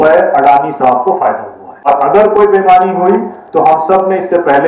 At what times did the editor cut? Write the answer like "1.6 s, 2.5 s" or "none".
1.8 s